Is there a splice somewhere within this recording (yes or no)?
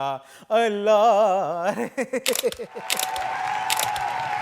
yes